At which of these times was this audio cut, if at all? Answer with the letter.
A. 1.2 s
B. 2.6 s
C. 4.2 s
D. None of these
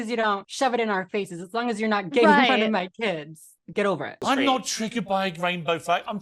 C